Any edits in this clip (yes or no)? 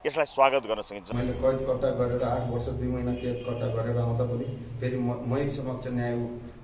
yes